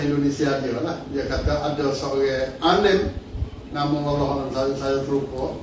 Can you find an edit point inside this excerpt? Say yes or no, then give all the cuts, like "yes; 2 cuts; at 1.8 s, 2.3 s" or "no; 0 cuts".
no; 0 cuts